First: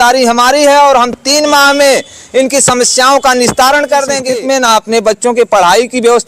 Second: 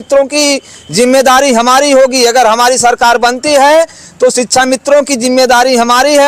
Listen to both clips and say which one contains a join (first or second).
first